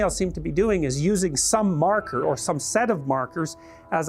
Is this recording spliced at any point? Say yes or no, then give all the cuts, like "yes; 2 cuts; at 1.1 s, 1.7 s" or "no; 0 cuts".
no; 0 cuts